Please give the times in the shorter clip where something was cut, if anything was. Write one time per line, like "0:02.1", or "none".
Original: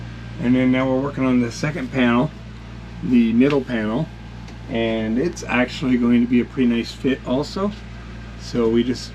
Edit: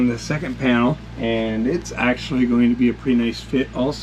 0:01.1